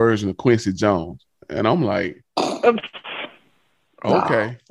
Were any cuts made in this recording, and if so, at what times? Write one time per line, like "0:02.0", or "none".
none